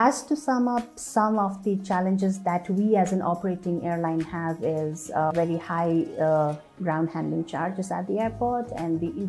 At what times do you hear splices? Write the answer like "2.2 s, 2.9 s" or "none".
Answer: 5.3 s